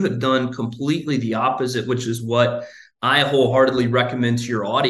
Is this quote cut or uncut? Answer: uncut